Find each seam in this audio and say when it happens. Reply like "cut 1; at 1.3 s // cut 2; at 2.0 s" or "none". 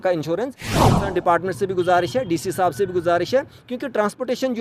cut 1; at 0.9 s